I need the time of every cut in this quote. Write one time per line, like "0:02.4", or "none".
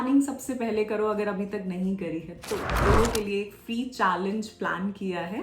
0:02.8